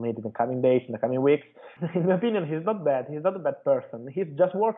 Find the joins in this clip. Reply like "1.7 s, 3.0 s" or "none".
1.6 s